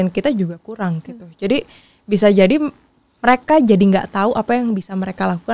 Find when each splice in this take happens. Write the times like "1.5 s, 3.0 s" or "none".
none